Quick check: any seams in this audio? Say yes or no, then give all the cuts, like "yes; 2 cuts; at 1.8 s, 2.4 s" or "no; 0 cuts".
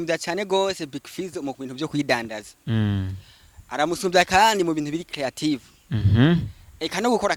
no; 0 cuts